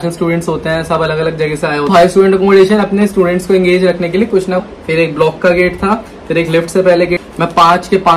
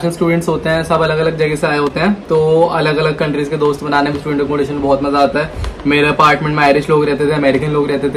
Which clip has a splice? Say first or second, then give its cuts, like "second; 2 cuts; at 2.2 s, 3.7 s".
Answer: first; 3 cuts; at 1.9 s, 4.6 s, 7.2 s